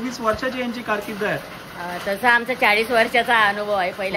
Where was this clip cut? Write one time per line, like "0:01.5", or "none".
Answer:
none